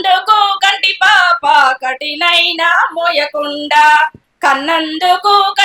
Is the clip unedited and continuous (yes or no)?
no